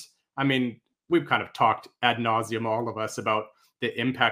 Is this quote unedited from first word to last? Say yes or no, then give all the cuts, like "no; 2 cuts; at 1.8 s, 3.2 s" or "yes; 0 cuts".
yes; 0 cuts